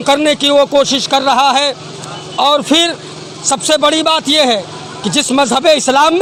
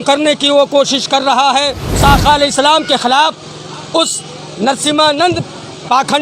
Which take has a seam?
second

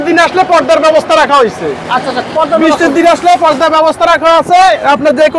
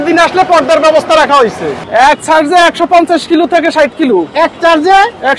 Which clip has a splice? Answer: second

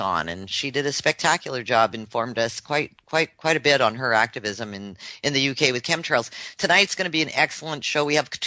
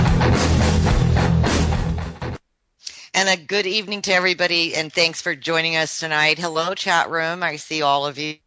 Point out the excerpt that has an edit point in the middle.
first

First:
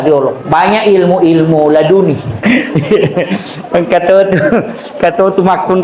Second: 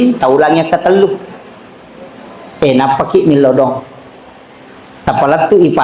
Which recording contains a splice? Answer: first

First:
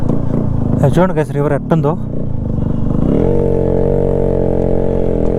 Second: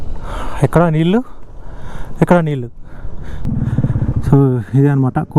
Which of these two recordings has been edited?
second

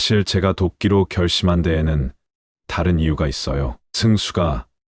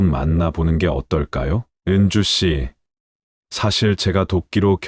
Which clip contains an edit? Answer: second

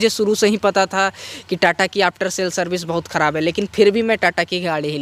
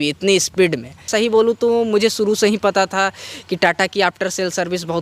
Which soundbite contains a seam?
second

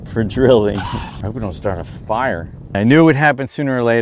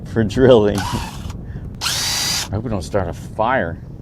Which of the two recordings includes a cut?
first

